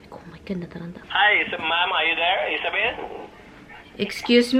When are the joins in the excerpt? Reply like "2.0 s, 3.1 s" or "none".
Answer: 1.0 s

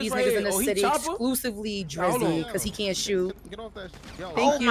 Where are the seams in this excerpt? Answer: none

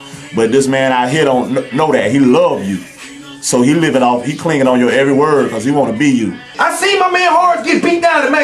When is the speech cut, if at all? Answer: 6.4 s

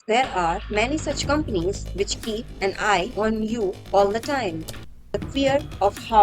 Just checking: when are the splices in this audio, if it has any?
5.1 s

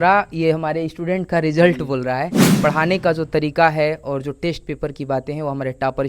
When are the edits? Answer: 2.6 s

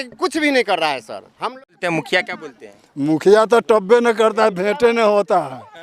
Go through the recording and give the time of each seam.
1.6 s

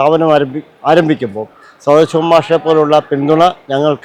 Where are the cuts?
none

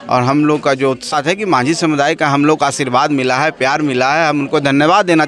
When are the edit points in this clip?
1.1 s

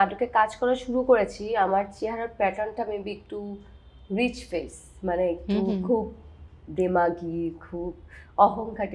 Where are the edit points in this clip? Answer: none

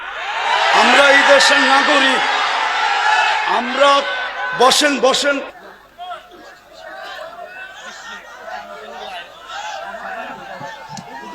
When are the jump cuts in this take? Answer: 5.5 s

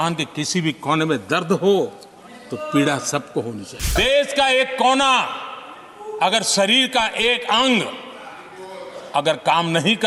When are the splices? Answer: 3.9 s

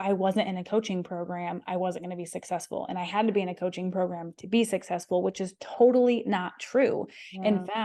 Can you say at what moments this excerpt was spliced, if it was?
none

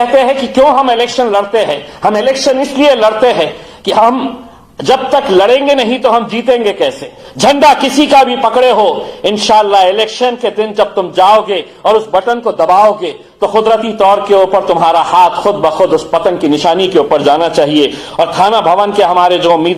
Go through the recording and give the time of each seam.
7.2 s

